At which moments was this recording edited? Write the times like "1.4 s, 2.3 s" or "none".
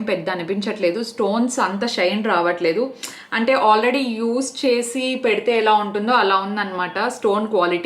none